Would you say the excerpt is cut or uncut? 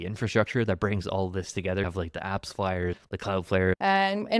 cut